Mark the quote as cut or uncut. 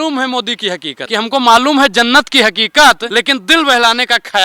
cut